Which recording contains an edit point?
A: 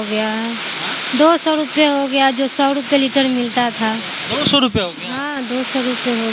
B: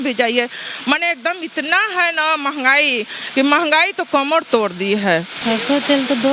B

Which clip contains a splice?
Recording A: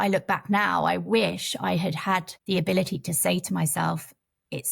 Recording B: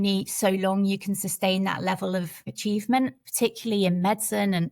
B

